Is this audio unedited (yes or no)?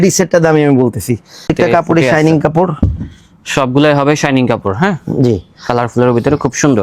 no